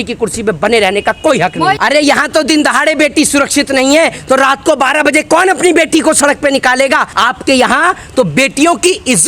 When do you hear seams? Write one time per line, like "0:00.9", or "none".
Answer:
0:01.8
0:07.1